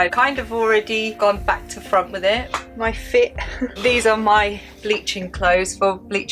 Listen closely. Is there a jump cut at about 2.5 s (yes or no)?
yes